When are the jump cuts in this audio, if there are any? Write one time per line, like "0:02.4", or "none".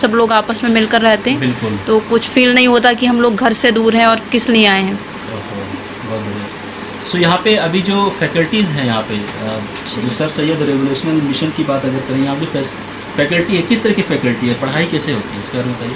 none